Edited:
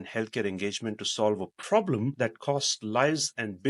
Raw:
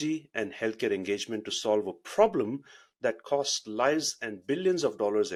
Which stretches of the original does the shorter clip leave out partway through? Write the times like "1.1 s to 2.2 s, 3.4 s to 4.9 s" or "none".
2.5 s to 2.9 s

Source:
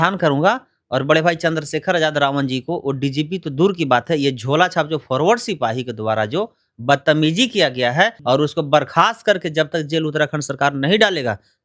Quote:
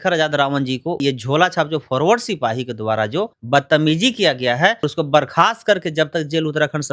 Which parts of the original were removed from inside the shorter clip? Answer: 2.8 s to 4.2 s, 6.6 s to 6.7 s, 8.2 s to 8.4 s

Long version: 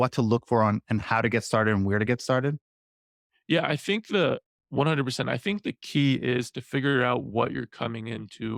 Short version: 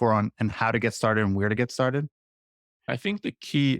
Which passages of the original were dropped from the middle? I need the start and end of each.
3.4 s to 5.3 s

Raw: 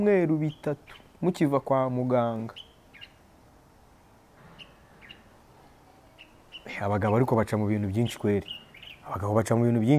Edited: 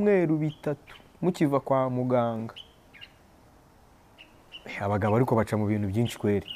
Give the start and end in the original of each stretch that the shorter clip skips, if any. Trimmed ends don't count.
4.2 s to 6.2 s

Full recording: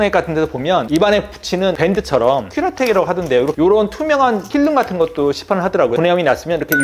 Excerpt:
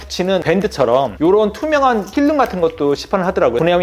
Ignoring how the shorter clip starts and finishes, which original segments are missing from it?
2.5 s to 3.5 s

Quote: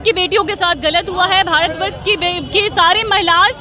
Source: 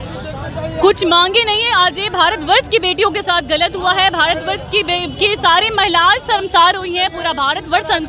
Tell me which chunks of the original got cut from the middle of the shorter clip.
none

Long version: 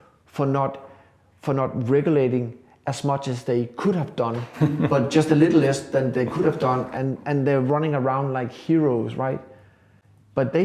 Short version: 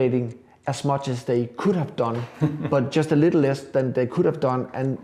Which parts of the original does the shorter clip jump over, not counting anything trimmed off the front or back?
none

